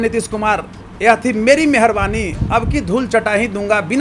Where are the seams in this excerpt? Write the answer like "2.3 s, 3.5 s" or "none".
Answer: none